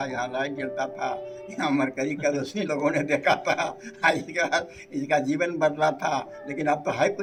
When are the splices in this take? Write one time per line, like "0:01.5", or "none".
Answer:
none